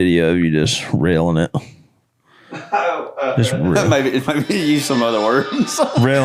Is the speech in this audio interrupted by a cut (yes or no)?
no